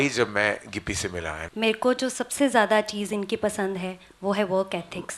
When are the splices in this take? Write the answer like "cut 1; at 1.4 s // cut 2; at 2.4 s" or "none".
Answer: cut 1; at 1.4 s